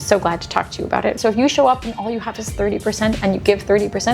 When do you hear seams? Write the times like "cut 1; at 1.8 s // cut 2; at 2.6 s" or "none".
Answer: cut 1; at 1.2 s